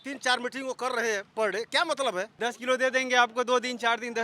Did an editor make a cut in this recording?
yes; 1 cut; at 2.3 s

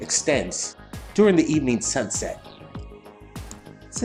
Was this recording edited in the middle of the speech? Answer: no; 0 cuts

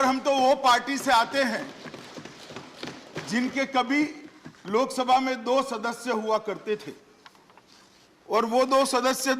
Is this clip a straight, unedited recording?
yes; 0 cuts

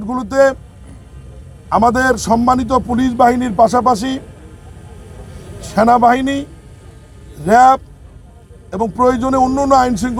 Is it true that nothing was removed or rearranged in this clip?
yes; 0 cuts

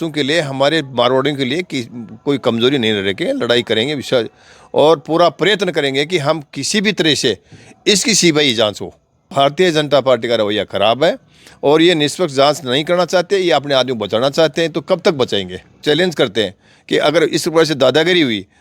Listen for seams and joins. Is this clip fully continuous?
no; 2 cuts; at 9.3 s, 15.8 s

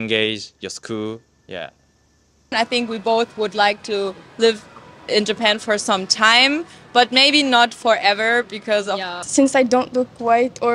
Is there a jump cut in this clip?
yes; 2 cuts; at 2.5 s, 9.2 s

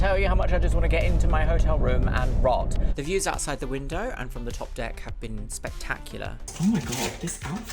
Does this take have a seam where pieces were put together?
yes; 2 cuts; at 2.8 s, 6.5 s

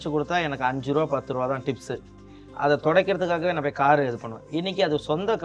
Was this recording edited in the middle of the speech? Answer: no; 0 cuts

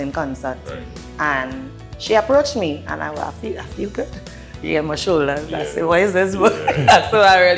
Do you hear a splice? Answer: no; 0 cuts

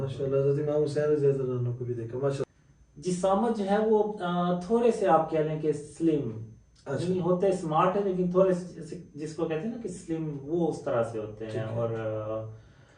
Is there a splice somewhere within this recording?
yes; 1 cut; at 2.4 s

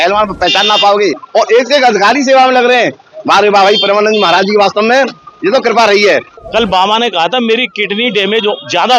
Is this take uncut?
no; 2 cuts; at 1.2 s, 6.4 s

